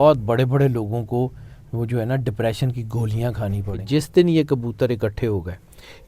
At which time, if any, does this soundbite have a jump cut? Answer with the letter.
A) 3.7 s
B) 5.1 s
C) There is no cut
A